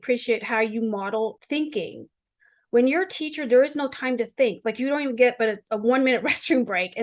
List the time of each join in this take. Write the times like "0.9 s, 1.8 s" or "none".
1.4 s